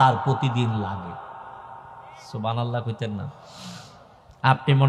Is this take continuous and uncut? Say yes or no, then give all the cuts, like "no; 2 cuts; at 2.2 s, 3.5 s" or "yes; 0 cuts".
yes; 0 cuts